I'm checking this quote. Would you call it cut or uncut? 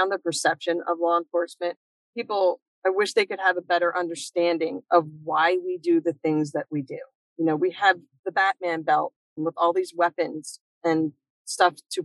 uncut